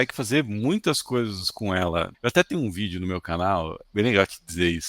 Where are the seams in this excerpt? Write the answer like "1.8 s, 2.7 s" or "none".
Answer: 2.1 s, 3.8 s